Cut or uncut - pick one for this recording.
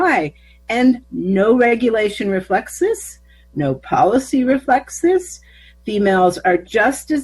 cut